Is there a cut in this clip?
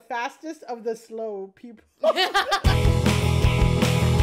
yes; 1 cut; at 2.6 s

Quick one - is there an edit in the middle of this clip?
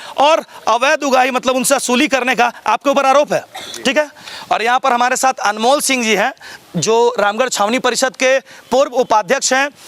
no; 0 cuts

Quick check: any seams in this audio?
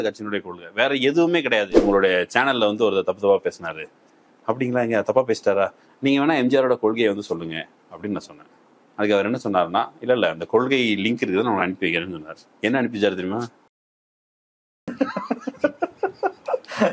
yes; 1 cut; at 1.7 s

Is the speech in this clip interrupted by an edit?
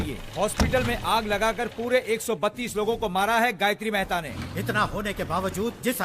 yes; 1 cut; at 4.3 s

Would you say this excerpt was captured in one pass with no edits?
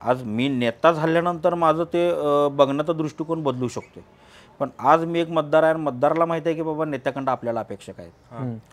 yes; 0 cuts

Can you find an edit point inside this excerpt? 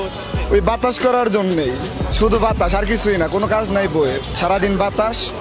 no; 0 cuts

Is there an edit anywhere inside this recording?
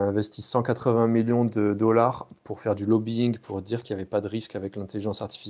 no; 0 cuts

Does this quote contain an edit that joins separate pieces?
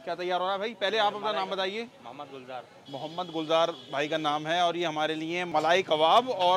yes; 1 cut; at 5.4 s

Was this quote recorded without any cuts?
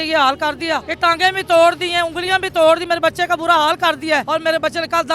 no; 2 cuts; at 0.9 s, 4.2 s

